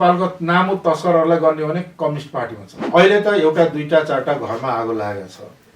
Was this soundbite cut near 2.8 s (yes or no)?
yes